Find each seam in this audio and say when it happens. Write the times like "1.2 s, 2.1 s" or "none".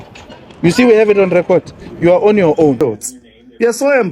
2.8 s